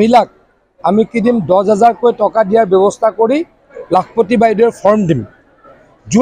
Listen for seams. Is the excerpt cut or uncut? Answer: uncut